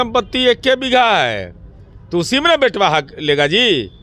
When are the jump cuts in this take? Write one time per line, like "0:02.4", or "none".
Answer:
none